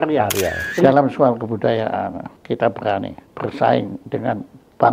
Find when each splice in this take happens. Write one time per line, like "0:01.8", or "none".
0:00.8
0:02.3
0:03.2